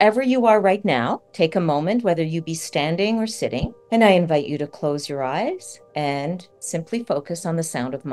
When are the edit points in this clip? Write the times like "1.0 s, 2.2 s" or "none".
1.2 s, 3.8 s, 5.8 s, 6.5 s